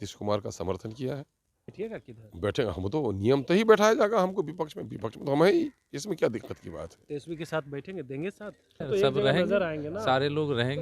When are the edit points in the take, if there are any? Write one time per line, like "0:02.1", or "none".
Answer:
0:01.7
0:08.9